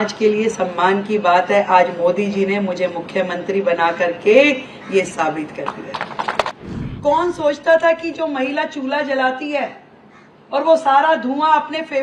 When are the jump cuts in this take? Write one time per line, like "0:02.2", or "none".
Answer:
0:06.5